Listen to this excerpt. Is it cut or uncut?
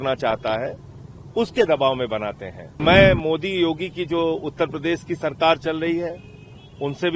cut